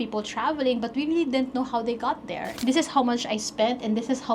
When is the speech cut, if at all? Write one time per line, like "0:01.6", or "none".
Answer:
0:02.5